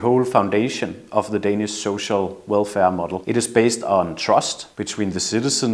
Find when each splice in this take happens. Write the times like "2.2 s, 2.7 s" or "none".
4.7 s